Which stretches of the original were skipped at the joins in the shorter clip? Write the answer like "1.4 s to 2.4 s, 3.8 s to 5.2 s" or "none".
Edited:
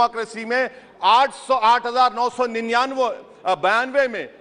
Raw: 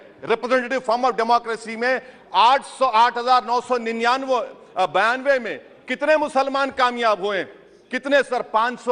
none